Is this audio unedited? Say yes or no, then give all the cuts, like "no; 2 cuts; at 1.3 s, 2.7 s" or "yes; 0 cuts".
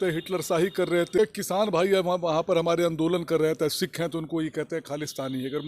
no; 1 cut; at 1.2 s